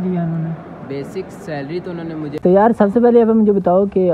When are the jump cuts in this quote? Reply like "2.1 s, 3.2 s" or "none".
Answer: 2.4 s